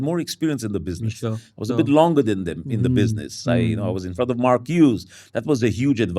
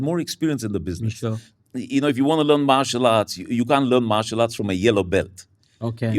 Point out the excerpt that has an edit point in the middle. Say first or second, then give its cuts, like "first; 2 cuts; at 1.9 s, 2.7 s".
second; 1 cut; at 1.5 s